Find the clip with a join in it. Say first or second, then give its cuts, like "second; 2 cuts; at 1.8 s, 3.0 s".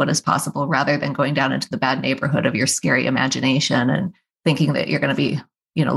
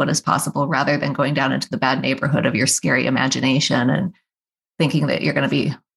first; 1 cut; at 4.2 s